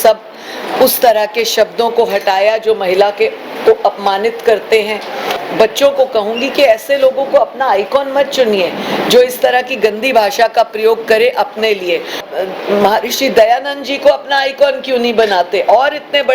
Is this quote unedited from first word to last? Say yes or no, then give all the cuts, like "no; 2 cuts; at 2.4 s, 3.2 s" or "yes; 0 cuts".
no; 2 cuts; at 5.4 s, 12.2 s